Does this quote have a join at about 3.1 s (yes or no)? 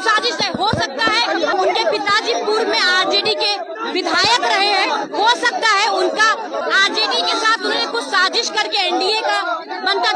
no